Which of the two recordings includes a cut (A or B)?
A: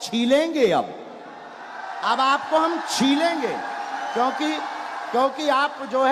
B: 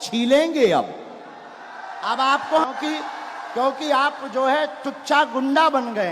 B